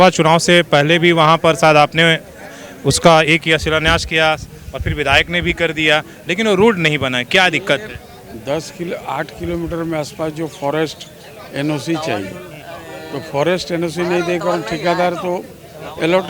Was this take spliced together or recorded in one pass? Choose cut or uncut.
uncut